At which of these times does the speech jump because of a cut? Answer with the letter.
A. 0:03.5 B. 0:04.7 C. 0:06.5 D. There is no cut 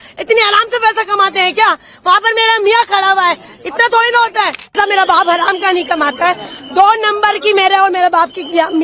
B